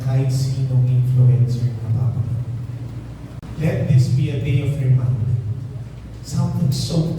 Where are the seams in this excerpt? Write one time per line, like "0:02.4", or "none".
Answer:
0:03.4